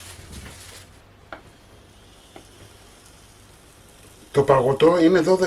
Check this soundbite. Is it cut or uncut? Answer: cut